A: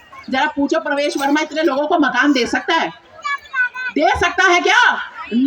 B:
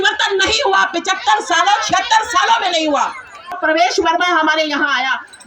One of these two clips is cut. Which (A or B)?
B